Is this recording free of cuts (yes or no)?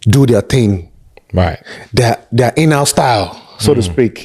yes